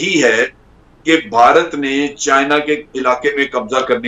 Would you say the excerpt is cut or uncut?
uncut